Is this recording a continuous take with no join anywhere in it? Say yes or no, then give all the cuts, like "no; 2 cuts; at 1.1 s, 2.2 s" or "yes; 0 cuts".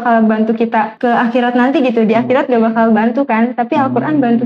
no; 1 cut; at 0.9 s